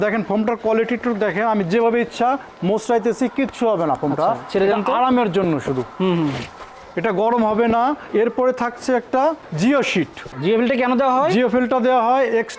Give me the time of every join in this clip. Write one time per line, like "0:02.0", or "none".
none